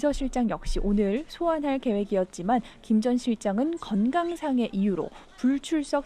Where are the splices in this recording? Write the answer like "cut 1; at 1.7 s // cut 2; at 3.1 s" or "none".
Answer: cut 1; at 4.2 s